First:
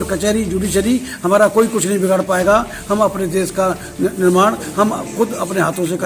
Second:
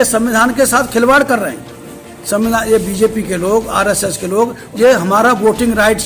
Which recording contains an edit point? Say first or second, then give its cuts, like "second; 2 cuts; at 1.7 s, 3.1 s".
second; 1 cut; at 4.6 s